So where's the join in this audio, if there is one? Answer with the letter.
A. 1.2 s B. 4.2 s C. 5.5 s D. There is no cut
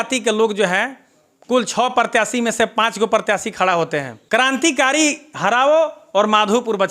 B